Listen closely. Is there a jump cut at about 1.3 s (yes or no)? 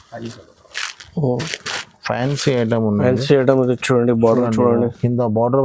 no